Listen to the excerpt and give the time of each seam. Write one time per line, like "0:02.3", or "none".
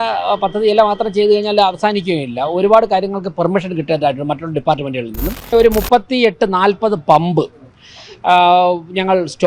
0:05.4